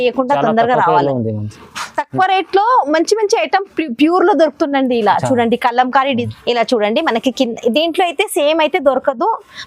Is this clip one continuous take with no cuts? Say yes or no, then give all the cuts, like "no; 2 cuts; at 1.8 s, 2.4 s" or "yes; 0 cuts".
no; 1 cut; at 6.2 s